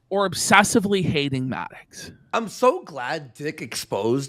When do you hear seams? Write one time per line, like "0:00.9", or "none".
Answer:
0:02.3